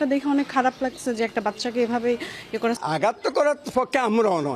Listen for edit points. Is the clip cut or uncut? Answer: uncut